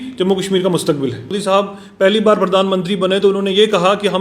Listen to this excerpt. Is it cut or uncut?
cut